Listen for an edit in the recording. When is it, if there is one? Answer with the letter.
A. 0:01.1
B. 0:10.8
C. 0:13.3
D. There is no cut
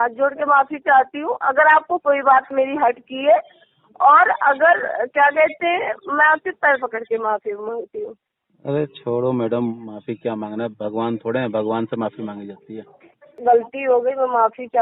C